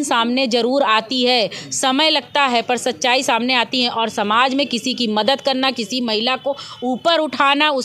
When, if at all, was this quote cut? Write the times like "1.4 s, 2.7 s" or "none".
none

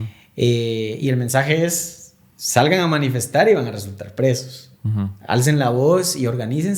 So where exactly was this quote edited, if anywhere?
none

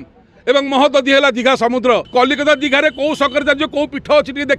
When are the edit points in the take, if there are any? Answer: 2.1 s

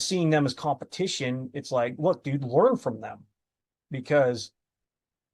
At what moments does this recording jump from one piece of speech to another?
none

